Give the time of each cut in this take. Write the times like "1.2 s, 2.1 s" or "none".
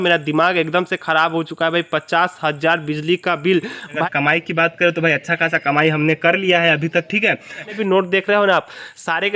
4.0 s, 7.7 s